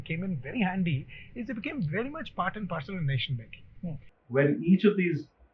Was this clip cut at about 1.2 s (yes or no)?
no